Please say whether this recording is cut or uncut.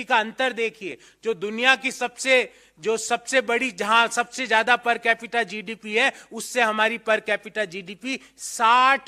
uncut